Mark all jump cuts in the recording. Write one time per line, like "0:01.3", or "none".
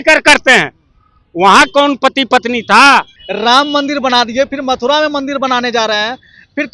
0:03.2